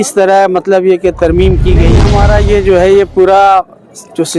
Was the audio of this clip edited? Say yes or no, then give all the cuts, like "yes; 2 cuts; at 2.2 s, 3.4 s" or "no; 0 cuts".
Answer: yes; 1 cut; at 2.0 s